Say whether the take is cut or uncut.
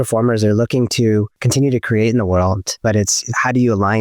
cut